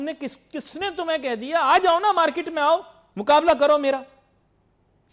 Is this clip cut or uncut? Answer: uncut